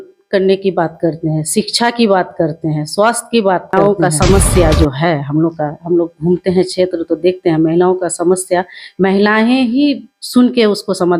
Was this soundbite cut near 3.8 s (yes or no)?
yes